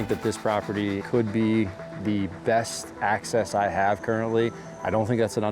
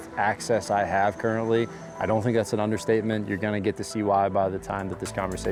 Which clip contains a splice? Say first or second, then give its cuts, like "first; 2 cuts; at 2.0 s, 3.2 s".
first; 1 cut; at 1.0 s